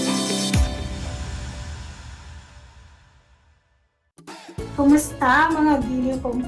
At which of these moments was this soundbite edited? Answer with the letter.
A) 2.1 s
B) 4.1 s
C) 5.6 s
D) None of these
B